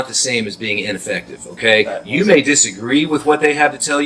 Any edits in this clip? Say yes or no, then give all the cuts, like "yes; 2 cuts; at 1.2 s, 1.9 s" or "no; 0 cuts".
no; 0 cuts